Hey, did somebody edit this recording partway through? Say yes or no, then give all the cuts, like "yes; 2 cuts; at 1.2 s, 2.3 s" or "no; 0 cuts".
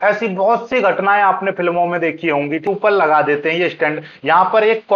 yes; 1 cut; at 2.7 s